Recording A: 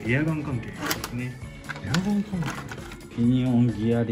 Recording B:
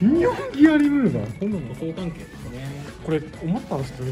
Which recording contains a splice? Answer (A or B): B